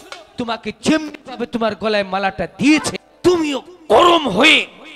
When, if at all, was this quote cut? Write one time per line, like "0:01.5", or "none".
0:03.0